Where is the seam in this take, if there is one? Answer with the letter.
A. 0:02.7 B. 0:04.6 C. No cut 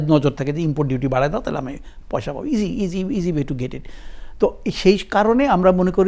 C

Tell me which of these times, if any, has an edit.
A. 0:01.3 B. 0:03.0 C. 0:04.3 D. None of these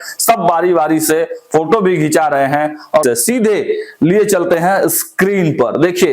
B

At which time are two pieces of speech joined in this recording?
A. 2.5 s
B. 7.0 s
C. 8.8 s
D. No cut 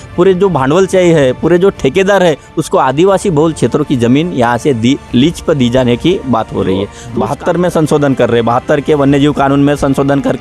B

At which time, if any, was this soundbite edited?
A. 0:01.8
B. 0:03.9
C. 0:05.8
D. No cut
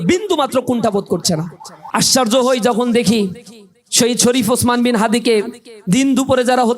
A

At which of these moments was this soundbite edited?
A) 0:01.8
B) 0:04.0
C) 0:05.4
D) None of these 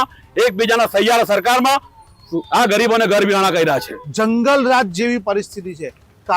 B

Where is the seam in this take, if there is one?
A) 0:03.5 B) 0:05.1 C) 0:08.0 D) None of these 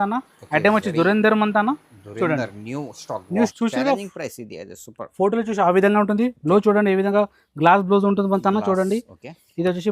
A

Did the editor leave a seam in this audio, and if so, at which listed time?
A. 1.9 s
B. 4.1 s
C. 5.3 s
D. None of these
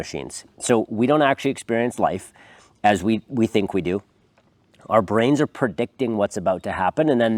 D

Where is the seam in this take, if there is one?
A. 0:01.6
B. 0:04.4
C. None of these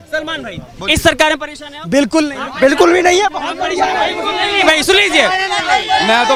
C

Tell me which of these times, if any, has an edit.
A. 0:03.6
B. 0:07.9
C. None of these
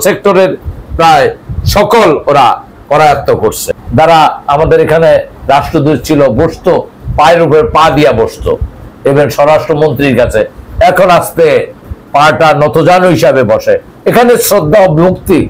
A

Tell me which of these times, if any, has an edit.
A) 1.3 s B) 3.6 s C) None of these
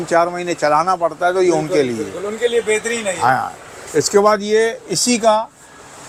C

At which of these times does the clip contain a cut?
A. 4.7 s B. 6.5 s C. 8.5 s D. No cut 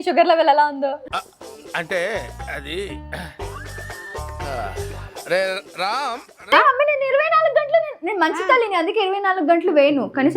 B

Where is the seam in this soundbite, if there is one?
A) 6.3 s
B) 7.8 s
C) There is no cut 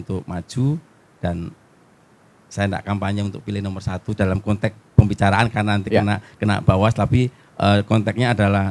C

